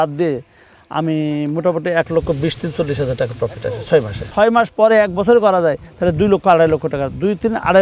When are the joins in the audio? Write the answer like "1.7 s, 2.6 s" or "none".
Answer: 4.3 s